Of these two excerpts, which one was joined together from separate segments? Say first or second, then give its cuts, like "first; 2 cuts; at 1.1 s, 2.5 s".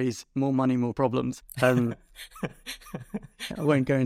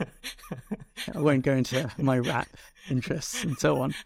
first; 1 cut; at 1.4 s